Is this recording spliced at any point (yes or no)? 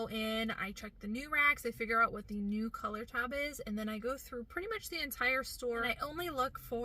yes